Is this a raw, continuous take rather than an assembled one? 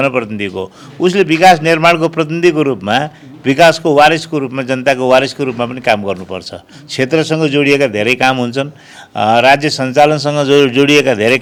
yes; 0 cuts

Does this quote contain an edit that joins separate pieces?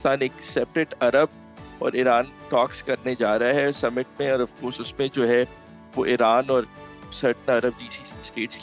no; 0 cuts

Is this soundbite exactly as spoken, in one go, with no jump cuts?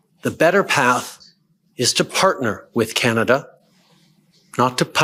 yes; 0 cuts

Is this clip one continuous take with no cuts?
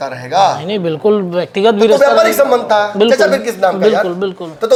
yes; 0 cuts

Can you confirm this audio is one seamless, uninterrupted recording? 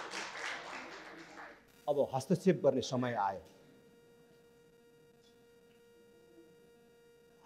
no; 1 cut; at 1.7 s

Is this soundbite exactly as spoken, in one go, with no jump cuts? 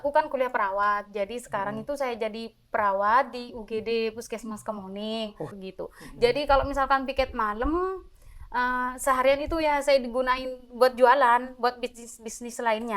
no; 1 cut; at 5.6 s

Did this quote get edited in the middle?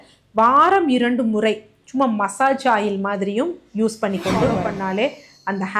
yes; 1 cut; at 4.6 s

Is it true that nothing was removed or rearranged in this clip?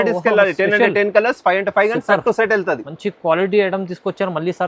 yes; 0 cuts

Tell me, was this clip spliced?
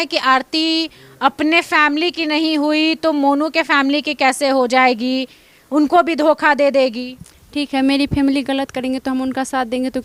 no; 0 cuts

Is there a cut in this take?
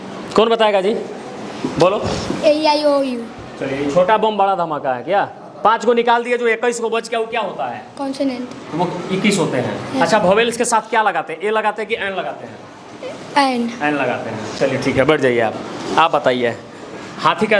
no; 0 cuts

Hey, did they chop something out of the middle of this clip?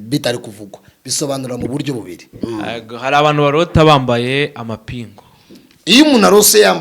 yes; 1 cut; at 2.4 s

